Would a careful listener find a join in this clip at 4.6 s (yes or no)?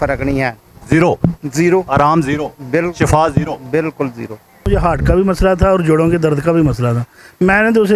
yes